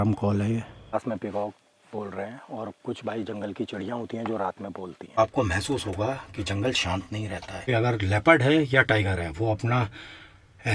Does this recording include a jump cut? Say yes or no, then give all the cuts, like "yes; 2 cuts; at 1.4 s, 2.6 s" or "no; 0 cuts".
yes; 3 cuts; at 0.9 s, 5.2 s, 7.7 s